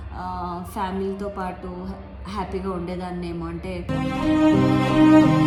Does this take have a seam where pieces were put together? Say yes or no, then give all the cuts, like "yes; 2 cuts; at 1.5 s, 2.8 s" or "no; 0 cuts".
no; 0 cuts